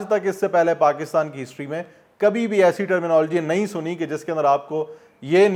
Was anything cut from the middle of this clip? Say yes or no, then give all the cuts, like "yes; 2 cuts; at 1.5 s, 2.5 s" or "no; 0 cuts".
no; 0 cuts